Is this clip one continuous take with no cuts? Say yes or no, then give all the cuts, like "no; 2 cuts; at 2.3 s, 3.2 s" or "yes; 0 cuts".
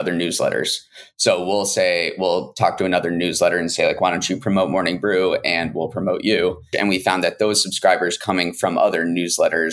no; 1 cut; at 6.7 s